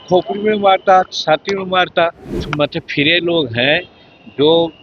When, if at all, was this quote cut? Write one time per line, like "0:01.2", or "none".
0:02.3